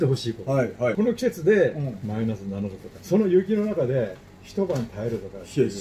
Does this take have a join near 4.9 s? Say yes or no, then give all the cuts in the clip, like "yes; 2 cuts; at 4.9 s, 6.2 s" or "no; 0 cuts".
no; 2 cuts; at 0.9 s, 3.0 s